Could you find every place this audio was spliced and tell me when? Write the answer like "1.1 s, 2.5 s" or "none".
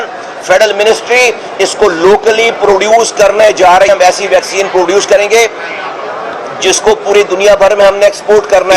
3.9 s